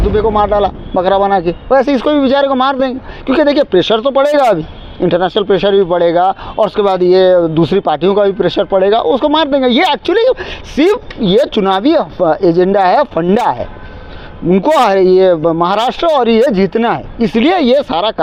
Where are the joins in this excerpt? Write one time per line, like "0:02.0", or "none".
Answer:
none